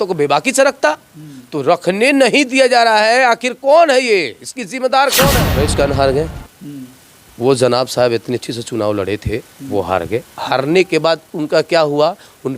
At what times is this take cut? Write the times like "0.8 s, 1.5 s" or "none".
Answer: 5.5 s